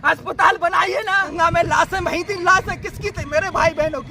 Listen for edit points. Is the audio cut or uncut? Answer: cut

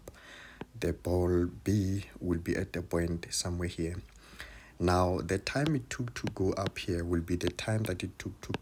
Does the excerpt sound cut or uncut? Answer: uncut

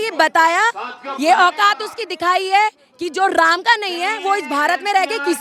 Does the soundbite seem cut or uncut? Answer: uncut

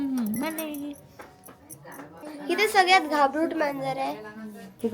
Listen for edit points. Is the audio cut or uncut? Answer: uncut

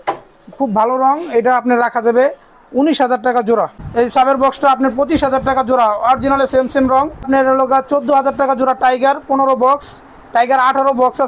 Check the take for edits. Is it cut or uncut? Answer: cut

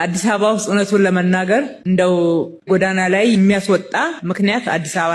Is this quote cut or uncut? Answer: uncut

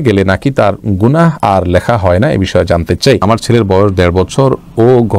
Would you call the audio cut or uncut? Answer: cut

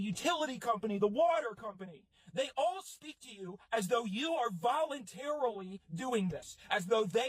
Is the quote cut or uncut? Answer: uncut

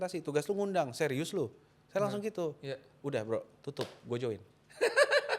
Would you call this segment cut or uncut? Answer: uncut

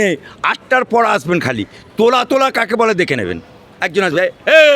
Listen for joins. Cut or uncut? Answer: uncut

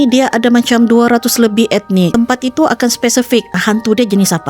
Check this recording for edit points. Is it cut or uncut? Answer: cut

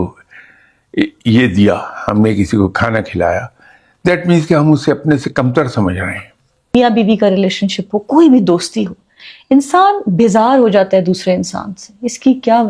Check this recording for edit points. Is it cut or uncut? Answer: cut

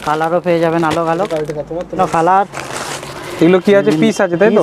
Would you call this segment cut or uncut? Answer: cut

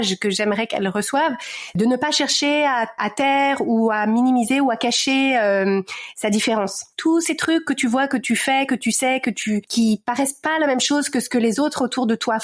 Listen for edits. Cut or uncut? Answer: cut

